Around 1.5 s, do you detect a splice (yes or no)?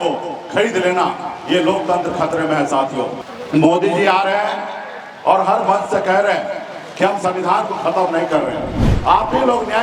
no